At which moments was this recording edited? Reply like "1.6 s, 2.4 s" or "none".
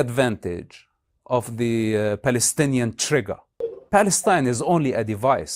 3.6 s

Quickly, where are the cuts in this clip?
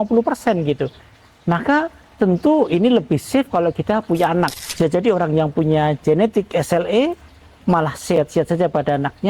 4.6 s

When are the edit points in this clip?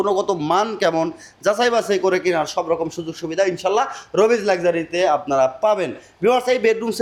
none

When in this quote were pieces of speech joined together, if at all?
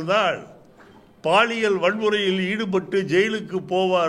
none

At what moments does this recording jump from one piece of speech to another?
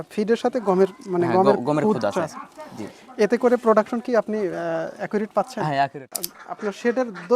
6.2 s

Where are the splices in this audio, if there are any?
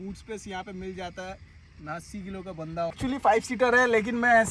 3.0 s

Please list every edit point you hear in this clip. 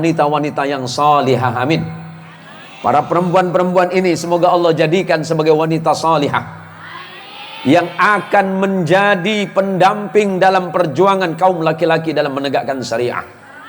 none

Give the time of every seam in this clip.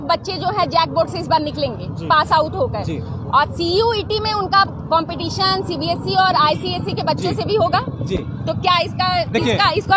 none

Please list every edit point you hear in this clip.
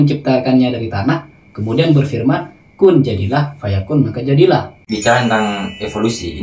4.8 s

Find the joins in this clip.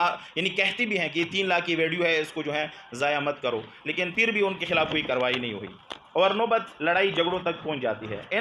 none

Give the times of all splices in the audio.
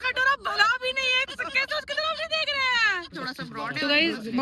3.1 s

